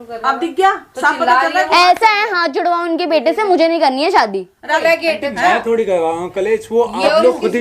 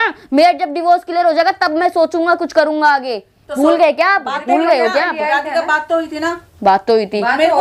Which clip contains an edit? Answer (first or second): first